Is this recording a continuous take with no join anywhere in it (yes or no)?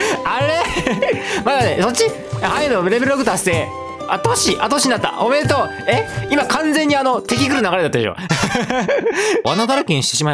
no